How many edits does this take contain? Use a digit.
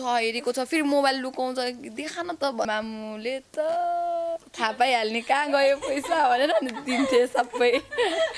1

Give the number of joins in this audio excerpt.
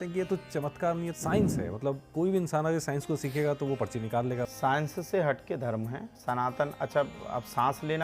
3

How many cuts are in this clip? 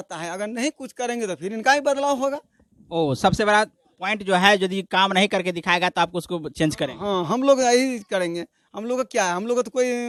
0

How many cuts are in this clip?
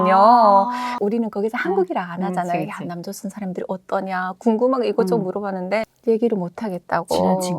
2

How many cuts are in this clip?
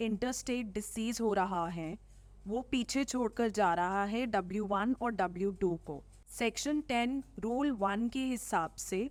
0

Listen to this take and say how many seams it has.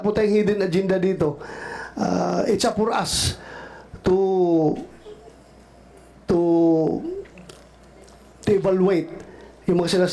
0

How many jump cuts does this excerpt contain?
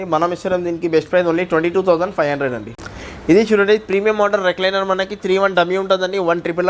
1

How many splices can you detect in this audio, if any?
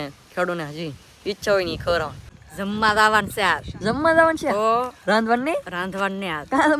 1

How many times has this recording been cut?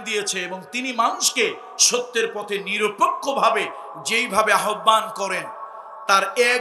0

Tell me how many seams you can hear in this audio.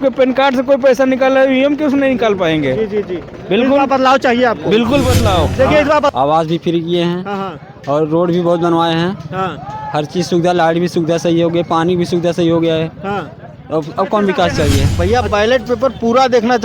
2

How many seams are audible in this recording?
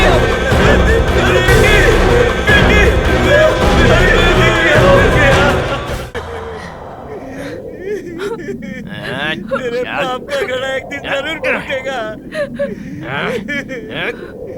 1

